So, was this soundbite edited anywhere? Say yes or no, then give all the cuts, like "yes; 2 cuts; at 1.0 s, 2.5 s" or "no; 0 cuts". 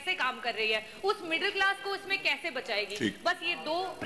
no; 0 cuts